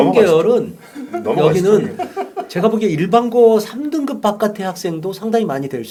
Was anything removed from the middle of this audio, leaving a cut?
no; 0 cuts

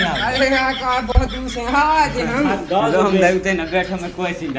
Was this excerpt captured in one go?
yes; 0 cuts

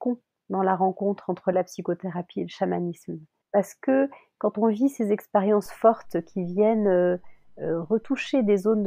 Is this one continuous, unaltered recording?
yes; 0 cuts

